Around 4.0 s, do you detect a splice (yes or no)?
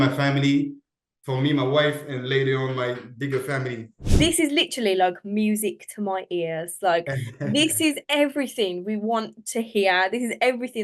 yes